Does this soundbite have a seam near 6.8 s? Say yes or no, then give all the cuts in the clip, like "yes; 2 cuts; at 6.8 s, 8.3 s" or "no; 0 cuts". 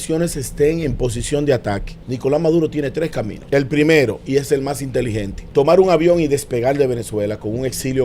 no; 3 cuts; at 1.9 s, 3.4 s, 5.4 s